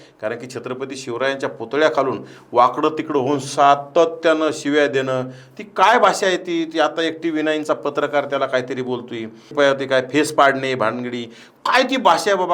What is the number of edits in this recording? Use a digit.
1